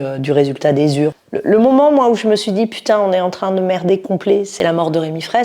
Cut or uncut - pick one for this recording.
cut